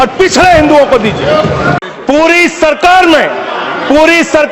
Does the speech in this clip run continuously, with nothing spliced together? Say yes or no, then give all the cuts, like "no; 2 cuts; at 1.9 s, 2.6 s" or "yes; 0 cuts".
no; 1 cut; at 1.8 s